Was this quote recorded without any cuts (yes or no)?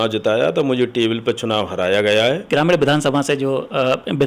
no